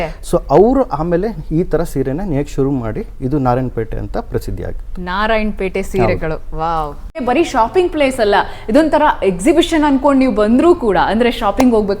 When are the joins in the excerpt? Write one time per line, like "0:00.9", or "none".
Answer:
0:07.2